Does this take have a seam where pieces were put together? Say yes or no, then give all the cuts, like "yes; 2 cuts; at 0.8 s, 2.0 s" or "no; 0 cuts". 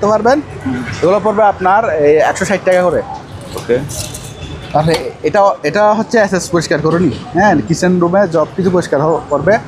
no; 0 cuts